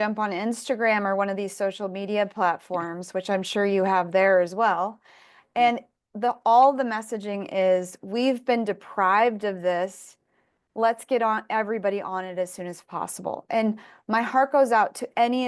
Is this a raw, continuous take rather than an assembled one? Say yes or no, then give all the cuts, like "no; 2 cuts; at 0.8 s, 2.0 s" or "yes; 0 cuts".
yes; 0 cuts